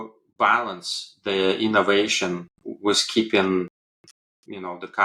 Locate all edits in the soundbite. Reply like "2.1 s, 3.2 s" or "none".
none